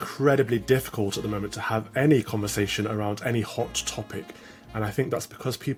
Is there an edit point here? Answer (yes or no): no